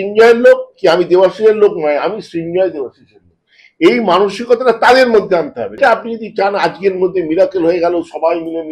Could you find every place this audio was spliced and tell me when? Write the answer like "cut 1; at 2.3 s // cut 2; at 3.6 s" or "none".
cut 1; at 5.8 s